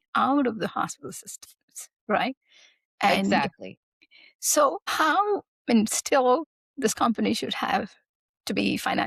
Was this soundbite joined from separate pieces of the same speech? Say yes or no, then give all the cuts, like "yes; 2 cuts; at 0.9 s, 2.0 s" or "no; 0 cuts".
no; 0 cuts